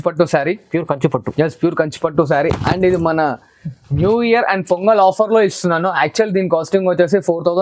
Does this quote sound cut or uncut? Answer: uncut